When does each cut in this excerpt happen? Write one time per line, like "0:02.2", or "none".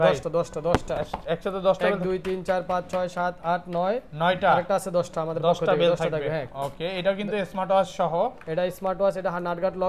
none